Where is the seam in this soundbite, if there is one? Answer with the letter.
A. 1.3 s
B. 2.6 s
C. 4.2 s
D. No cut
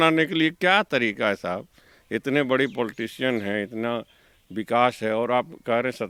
D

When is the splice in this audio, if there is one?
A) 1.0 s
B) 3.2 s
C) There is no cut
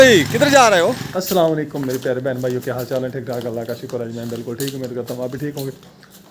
A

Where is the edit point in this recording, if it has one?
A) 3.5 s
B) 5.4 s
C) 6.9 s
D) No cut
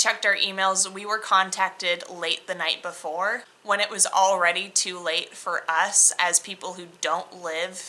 A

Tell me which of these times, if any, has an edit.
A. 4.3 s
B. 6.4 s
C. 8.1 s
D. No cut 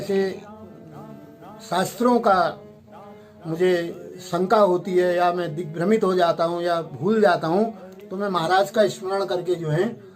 D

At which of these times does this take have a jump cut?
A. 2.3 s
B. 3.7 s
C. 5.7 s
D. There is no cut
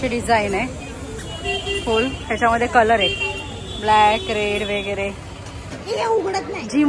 C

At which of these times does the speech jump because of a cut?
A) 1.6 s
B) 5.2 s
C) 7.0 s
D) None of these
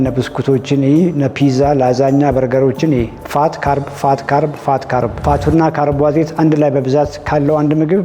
B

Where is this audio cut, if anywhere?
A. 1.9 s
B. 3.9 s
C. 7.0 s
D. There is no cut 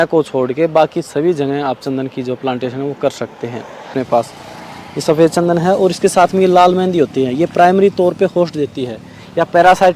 B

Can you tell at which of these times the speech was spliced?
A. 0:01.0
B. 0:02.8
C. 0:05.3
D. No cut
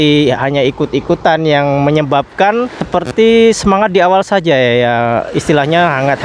B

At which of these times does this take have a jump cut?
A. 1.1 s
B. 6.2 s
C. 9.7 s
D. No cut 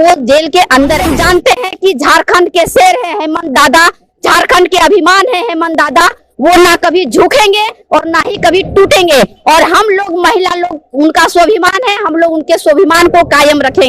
A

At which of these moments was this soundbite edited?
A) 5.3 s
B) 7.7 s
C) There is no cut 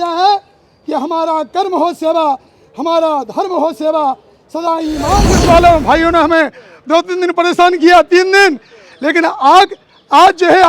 A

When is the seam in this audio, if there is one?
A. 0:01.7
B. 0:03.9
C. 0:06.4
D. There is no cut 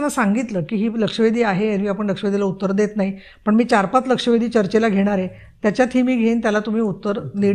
D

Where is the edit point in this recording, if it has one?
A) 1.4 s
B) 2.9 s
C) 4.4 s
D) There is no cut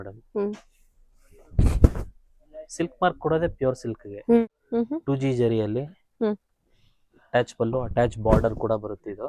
C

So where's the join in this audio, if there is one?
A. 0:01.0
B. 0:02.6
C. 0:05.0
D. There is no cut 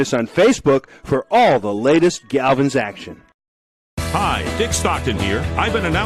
C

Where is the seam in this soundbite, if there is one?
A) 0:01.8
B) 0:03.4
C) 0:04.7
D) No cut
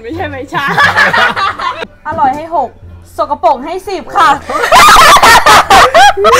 A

